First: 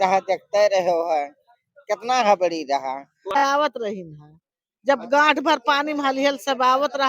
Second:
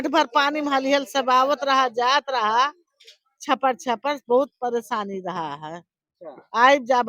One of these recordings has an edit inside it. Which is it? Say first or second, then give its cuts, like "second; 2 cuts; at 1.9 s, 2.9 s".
first; 1 cut; at 3.4 s